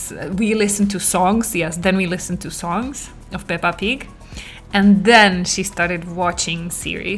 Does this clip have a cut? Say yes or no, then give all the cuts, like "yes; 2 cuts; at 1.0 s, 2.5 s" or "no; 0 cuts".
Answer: no; 0 cuts